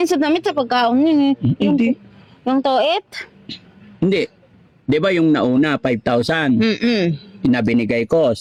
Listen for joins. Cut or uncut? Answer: uncut